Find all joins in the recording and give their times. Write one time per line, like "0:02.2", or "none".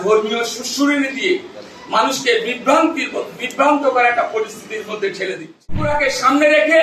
0:05.8